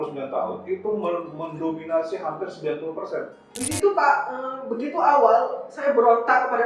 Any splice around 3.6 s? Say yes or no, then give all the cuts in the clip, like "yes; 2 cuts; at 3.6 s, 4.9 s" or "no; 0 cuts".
yes; 1 cut; at 3.6 s